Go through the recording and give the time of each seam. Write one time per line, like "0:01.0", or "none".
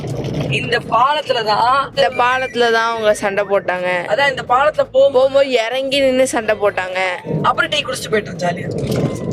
0:01.9
0:07.3